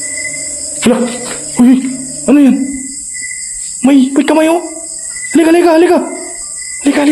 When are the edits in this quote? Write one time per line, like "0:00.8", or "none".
none